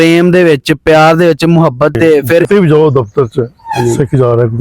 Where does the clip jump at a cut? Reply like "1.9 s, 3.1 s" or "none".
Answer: 2.4 s